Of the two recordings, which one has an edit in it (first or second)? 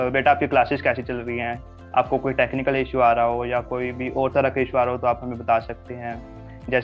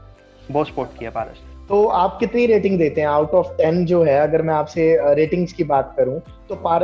second